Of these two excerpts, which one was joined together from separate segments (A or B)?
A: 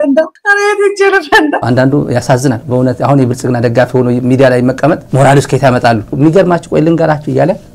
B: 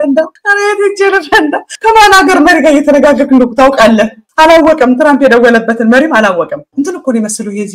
A